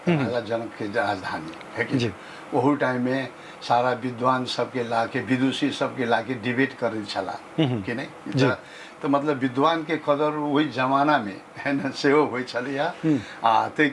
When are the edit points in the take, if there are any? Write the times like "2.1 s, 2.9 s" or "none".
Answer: none